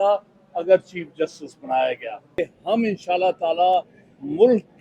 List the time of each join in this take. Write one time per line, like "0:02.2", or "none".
0:02.5